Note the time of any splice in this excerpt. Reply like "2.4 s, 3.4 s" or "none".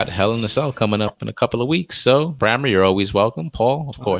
2.3 s